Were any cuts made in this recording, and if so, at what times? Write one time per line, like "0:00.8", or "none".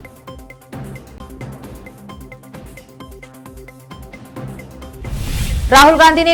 none